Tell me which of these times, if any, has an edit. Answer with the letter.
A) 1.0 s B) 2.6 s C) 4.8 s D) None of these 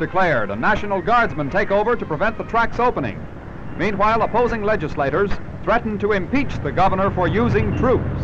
D